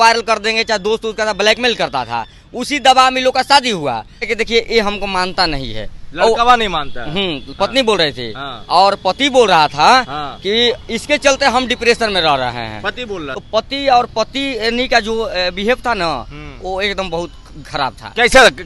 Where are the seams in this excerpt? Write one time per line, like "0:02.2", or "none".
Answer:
0:04.2
0:13.2